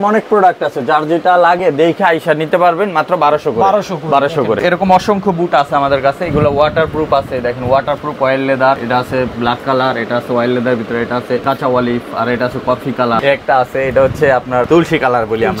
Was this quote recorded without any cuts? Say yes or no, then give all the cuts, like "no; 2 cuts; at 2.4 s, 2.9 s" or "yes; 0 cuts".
no; 5 cuts; at 4.6 s, 8.8 s, 11.4 s, 13.2 s, 14.7 s